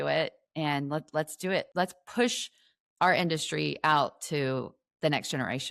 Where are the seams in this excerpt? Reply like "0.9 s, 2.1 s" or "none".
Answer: 1.7 s